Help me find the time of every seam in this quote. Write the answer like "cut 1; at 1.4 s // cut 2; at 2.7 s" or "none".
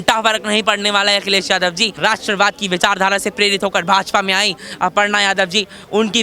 cut 1; at 2.0 s